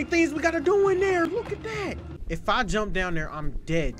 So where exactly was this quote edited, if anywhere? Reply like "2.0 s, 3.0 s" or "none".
2.1 s